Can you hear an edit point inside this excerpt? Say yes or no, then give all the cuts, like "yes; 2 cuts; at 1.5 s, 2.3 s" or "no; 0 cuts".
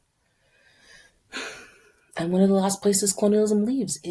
no; 0 cuts